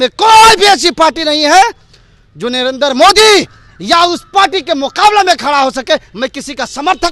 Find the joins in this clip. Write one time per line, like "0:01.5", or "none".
none